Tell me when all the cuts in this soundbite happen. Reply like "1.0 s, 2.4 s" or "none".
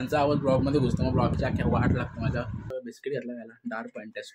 2.7 s